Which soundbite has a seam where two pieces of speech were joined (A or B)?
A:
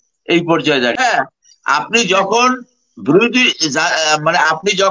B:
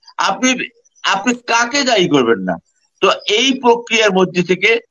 A